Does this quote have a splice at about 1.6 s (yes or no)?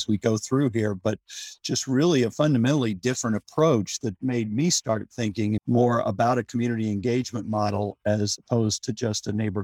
no